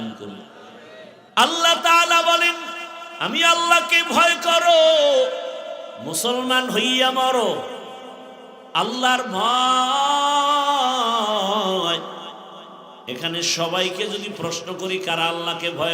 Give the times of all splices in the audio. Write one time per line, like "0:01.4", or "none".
0:01.2